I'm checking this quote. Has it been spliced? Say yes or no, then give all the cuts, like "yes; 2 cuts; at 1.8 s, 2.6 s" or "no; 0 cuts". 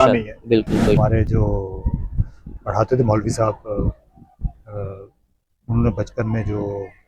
yes; 1 cut; at 1.0 s